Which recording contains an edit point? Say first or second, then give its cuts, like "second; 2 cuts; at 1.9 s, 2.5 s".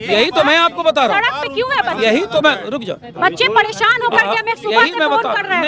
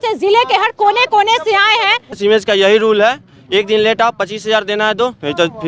second; 1 cut; at 2.2 s